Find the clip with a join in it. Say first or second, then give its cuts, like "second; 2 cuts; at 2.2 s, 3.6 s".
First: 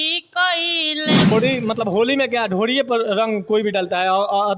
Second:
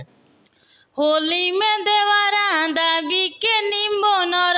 first; 1 cut; at 1.3 s